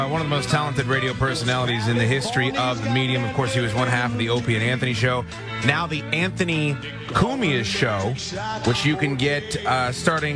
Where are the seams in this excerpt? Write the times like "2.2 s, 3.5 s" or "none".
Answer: none